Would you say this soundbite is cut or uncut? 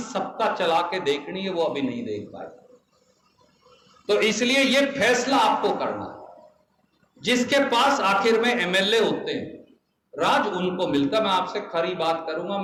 uncut